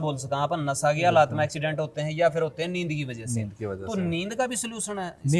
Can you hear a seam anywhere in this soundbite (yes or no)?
no